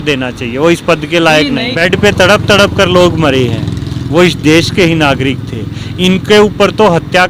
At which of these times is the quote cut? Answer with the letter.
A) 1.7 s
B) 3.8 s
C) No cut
A